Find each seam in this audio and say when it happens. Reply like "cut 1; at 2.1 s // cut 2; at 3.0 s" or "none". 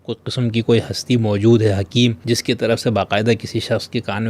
cut 1; at 2.2 s